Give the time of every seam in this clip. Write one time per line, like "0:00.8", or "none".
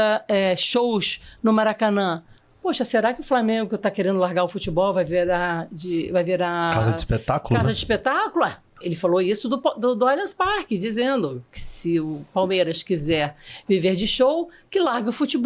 0:09.2